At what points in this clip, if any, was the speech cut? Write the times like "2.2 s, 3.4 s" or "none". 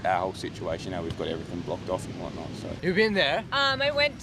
2.7 s